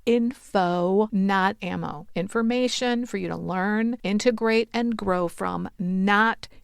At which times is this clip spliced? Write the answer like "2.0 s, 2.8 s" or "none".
1.1 s, 4.0 s